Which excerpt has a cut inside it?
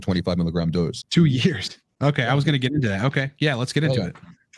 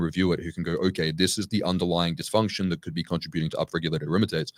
first; 1 cut; at 1.0 s

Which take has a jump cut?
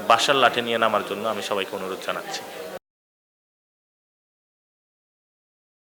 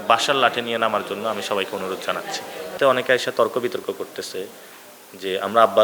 second; 1 cut; at 2.8 s

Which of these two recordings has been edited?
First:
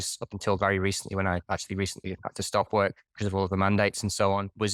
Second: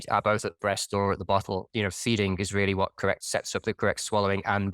second; 2 cuts; at 1.7 s, 3.2 s

